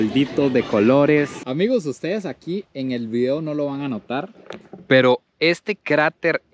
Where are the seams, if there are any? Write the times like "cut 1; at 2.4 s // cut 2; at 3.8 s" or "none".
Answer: cut 1; at 1.4 s